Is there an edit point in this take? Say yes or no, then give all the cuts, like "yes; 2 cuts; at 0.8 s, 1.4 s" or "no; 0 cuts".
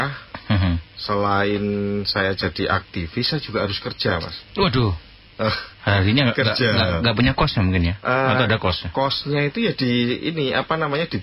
no; 0 cuts